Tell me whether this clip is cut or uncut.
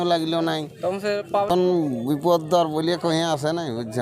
cut